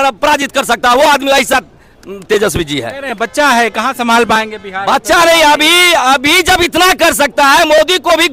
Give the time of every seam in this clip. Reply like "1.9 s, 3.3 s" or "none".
none